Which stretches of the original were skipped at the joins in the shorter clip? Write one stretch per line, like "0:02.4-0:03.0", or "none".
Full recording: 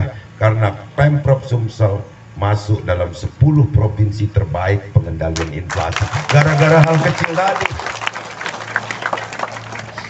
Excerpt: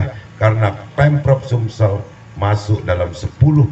none